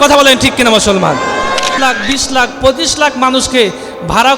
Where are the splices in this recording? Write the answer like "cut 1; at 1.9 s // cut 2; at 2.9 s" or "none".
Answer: cut 1; at 1.8 s